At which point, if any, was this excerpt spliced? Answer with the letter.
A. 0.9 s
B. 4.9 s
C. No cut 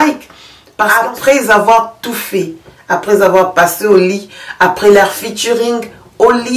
A